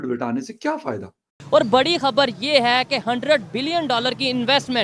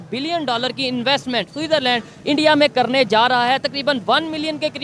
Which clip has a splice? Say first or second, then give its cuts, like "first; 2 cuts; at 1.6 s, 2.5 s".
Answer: first; 1 cut; at 1.4 s